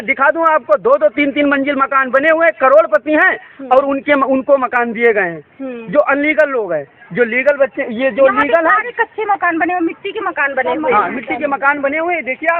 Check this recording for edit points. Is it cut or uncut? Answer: uncut